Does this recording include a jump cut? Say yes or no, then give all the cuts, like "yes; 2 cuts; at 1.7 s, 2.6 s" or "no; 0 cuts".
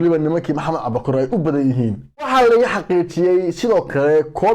yes; 1 cut; at 2.3 s